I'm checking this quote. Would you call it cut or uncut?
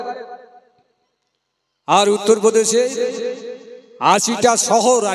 uncut